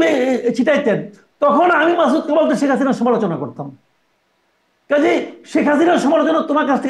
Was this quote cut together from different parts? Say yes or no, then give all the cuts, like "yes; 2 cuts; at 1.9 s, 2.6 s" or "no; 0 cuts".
no; 0 cuts